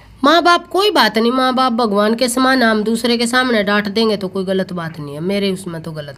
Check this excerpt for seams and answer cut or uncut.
uncut